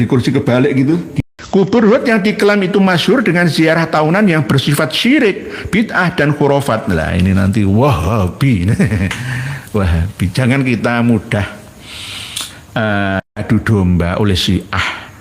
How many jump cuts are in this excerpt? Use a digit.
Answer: 1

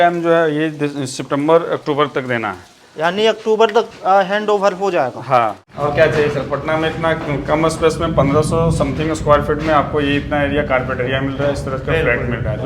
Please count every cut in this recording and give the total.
1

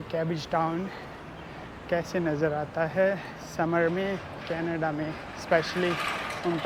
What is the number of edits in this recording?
0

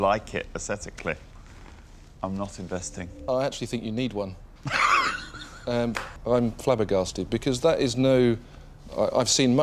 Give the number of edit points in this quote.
2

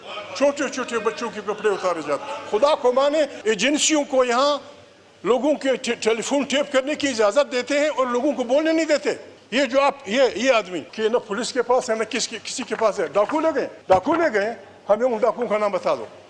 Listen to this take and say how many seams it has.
4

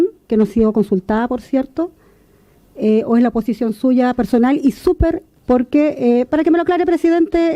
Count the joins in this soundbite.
1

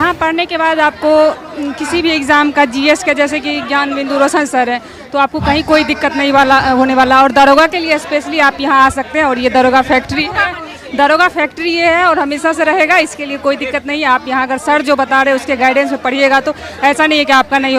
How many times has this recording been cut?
0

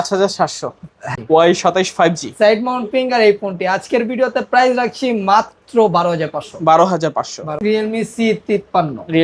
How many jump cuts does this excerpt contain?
2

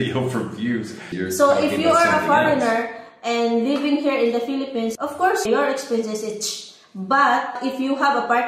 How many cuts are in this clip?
3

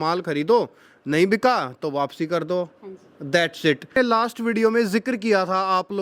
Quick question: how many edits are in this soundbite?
1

